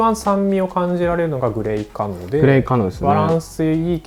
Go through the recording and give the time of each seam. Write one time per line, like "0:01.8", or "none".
none